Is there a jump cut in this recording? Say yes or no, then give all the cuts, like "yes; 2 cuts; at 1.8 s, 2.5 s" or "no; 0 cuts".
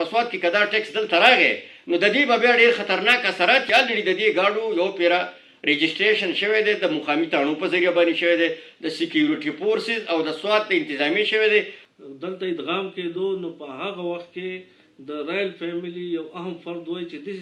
yes; 2 cuts; at 3.7 s, 11.8 s